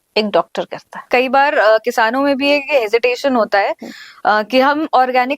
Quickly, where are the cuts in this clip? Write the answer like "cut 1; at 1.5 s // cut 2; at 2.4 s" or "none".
cut 1; at 1.1 s